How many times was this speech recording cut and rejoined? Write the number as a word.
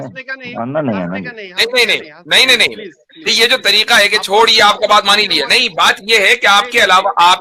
zero